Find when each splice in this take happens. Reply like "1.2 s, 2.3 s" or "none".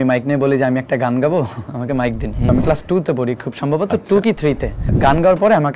2.5 s, 4.9 s

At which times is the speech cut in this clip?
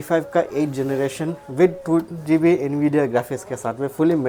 none

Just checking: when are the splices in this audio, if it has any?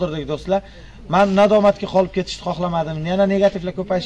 none

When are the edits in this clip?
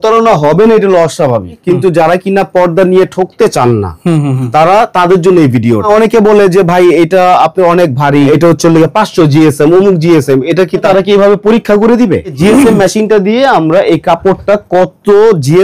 1.6 s, 5.9 s, 8.3 s, 10.8 s, 12.4 s

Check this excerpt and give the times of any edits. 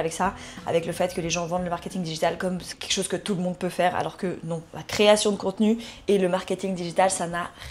none

